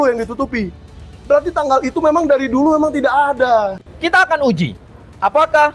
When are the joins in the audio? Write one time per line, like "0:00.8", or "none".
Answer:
0:03.9